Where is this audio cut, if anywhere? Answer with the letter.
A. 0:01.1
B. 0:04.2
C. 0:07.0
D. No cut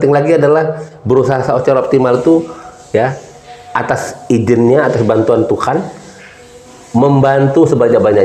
D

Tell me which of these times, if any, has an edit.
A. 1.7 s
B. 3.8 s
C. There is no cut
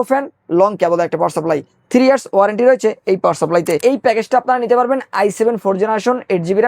B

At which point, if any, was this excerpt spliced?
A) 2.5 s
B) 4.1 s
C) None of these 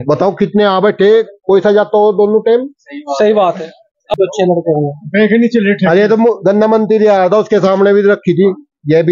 B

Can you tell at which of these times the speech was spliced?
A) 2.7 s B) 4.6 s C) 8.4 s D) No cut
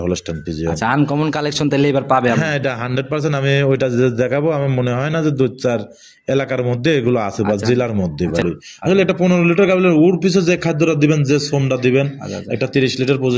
C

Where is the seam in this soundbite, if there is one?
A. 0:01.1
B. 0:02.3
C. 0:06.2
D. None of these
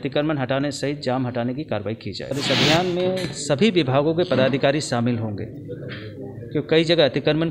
B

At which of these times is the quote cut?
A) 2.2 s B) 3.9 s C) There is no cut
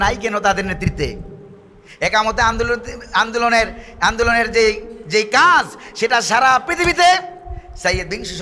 C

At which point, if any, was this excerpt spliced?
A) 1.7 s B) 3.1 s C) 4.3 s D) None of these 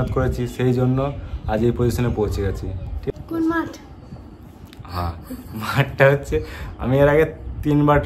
B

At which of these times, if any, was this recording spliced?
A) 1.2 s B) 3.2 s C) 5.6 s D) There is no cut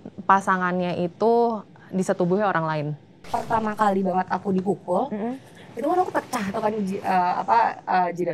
B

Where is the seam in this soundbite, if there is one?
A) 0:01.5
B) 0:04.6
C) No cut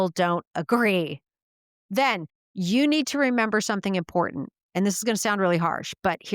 A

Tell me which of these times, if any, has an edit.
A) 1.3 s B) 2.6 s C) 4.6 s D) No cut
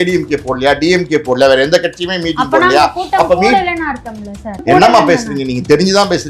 C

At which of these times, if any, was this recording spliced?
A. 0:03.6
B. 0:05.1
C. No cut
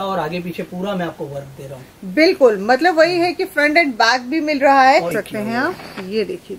B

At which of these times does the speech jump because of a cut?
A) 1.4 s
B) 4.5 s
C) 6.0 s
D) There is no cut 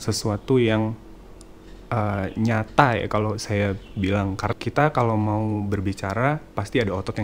B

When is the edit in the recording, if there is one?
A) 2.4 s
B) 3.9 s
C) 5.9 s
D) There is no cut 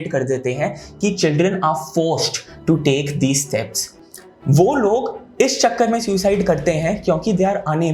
B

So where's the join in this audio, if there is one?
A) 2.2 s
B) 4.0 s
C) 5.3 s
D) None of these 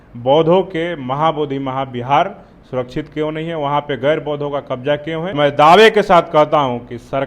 C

